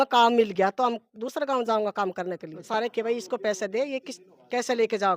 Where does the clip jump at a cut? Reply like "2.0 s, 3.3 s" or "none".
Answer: 2.7 s